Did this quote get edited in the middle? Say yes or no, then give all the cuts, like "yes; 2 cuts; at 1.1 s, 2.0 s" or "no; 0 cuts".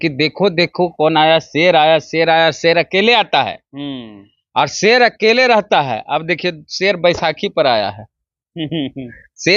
no; 0 cuts